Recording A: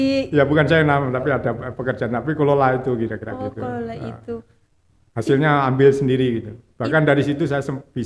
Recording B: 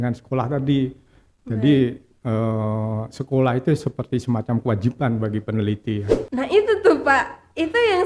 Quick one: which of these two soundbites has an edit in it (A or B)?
B